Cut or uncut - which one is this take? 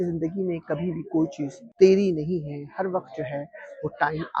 cut